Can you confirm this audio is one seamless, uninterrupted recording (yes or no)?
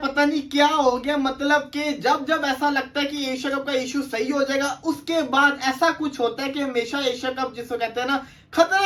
yes